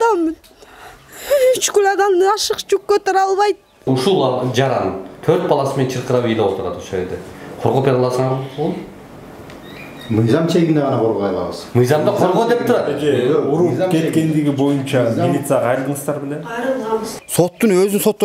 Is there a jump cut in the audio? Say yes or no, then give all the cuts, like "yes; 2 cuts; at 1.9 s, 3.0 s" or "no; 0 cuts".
yes; 2 cuts; at 3.9 s, 17.1 s